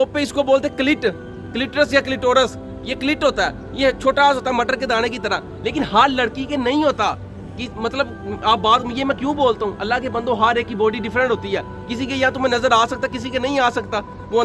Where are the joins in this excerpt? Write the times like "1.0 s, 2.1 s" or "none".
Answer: none